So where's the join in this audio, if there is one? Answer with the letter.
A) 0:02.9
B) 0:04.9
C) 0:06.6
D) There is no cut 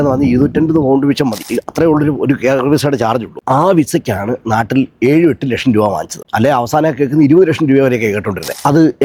D